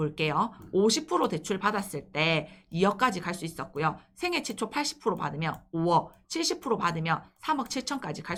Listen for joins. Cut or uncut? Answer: uncut